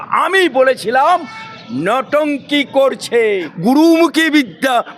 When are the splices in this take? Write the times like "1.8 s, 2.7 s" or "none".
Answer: 3.5 s